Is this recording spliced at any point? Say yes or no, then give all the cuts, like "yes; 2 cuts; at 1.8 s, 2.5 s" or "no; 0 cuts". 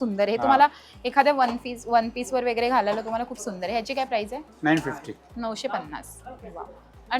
no; 0 cuts